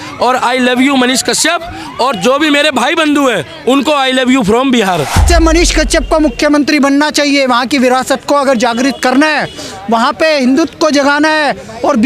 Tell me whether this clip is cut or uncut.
cut